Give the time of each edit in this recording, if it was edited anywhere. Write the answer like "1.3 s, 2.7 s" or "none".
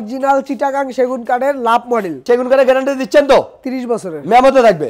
2.1 s

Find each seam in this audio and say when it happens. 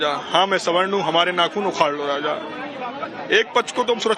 none

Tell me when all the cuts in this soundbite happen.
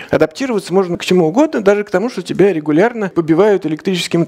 1.0 s, 3.1 s

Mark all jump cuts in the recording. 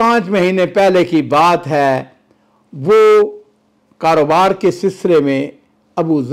none

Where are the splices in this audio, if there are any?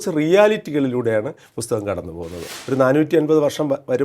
2.5 s

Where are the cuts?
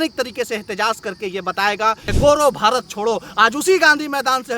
2.1 s

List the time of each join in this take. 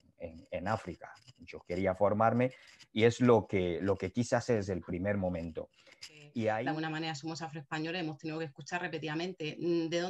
6.6 s

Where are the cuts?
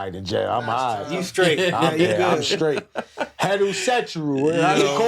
none

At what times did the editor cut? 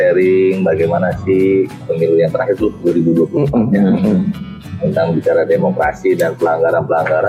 1.9 s

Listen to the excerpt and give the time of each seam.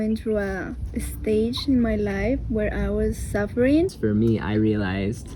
3.9 s

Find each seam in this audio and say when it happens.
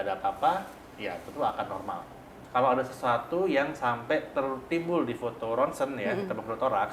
2.4 s

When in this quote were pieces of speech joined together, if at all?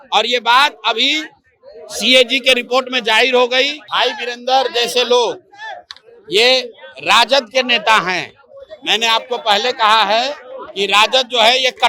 3.8 s

